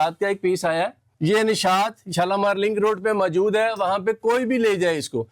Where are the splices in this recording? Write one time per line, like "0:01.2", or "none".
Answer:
0:01.1